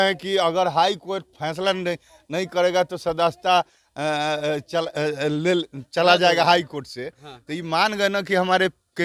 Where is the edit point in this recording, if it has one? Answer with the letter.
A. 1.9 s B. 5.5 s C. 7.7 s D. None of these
D